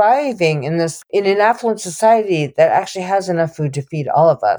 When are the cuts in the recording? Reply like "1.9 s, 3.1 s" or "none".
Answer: 1.1 s